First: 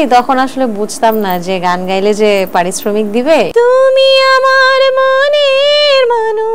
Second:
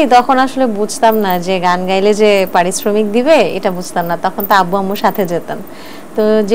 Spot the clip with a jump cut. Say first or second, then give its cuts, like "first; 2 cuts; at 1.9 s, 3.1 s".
first; 1 cut; at 3.5 s